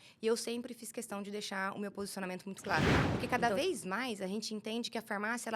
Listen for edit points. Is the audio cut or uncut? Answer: cut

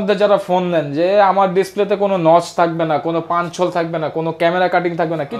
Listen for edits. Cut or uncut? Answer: uncut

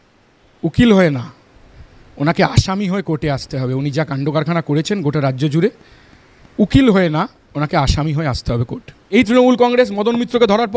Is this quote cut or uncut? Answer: cut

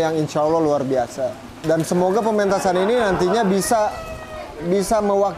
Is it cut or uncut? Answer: uncut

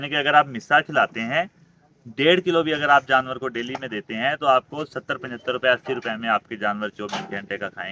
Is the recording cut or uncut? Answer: uncut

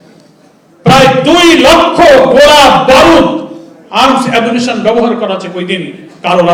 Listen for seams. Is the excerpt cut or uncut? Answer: uncut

